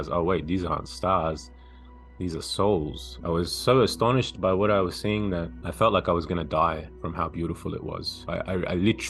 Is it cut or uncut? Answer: cut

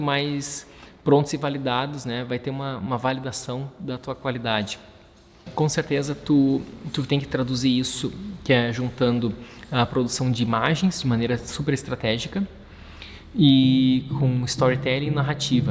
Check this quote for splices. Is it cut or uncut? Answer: cut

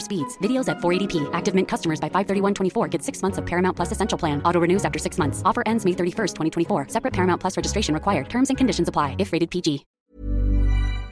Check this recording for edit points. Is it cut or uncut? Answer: cut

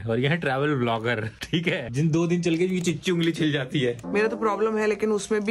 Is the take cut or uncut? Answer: cut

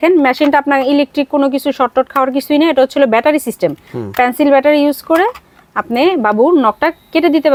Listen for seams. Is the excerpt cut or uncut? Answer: uncut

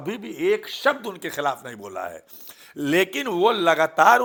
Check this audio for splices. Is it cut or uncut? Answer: uncut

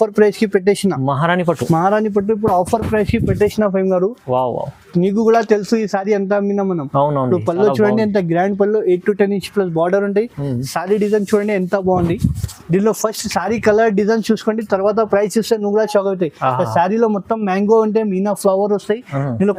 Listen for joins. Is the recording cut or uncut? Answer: uncut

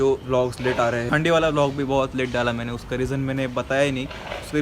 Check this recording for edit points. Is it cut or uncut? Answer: cut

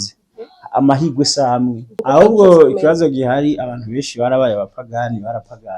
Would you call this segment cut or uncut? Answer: cut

